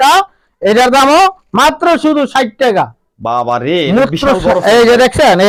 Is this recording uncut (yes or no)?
yes